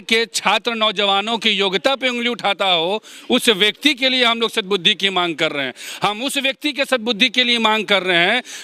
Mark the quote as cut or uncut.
uncut